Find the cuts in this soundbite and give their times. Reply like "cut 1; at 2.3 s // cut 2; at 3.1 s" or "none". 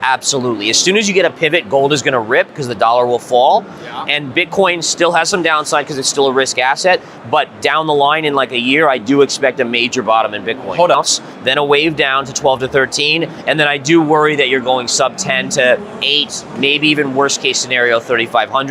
cut 1; at 11.0 s